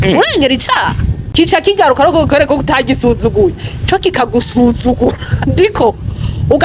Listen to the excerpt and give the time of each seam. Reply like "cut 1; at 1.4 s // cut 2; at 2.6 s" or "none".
cut 1; at 1.1 s